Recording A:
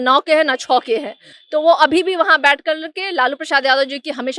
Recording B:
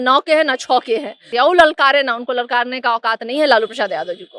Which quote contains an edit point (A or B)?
B